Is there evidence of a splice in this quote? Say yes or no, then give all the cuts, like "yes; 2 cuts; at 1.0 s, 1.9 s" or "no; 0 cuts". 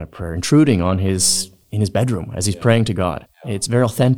yes; 1 cut; at 3.3 s